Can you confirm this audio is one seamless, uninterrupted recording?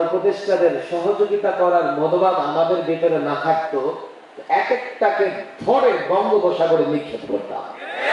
yes; 0 cuts

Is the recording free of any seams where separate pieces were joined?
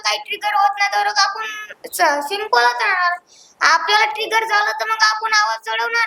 yes; 0 cuts

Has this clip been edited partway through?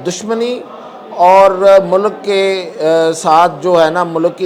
no; 0 cuts

